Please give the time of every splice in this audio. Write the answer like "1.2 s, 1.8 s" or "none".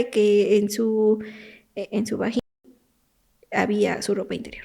none